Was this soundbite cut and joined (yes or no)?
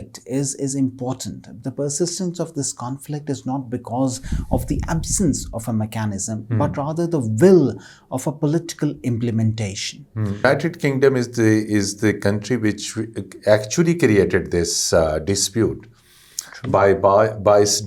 yes